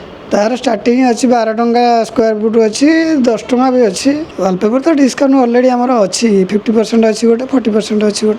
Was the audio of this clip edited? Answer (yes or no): yes